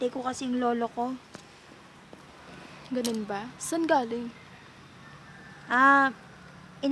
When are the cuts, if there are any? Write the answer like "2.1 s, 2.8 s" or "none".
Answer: none